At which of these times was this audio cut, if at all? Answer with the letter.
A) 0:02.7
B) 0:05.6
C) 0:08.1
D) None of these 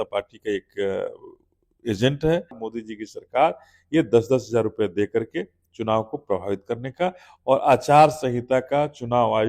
A